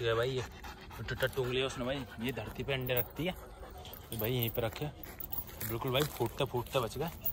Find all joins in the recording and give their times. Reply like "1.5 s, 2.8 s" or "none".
none